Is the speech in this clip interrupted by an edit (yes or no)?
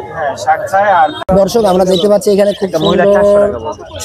yes